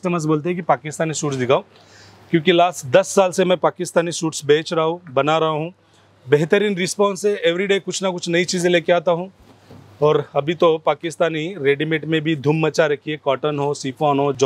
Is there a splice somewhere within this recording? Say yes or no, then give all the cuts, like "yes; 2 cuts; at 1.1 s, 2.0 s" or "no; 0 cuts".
no; 0 cuts